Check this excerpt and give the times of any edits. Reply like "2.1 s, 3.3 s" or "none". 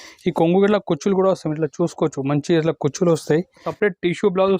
3.7 s